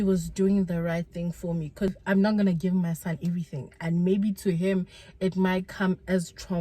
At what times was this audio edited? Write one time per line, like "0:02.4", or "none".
0:02.0